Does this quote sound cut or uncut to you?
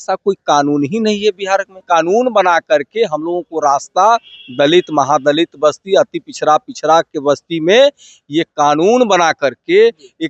cut